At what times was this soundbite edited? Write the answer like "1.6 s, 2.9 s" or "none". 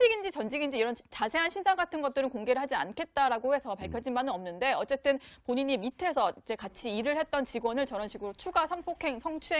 3.2 s